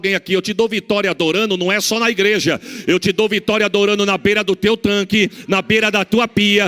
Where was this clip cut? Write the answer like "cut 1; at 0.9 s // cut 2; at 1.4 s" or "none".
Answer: none